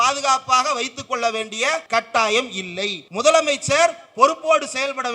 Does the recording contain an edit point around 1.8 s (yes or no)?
yes